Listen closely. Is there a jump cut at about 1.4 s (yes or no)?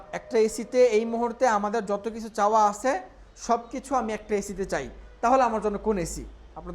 no